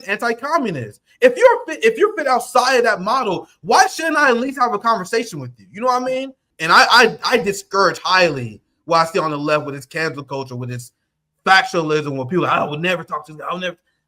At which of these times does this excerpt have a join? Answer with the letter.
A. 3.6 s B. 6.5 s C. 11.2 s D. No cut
B